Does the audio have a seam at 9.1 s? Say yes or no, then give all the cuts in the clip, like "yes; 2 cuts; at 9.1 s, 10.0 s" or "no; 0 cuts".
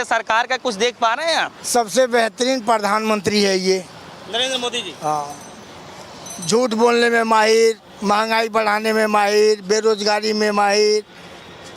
no; 1 cut; at 1.6 s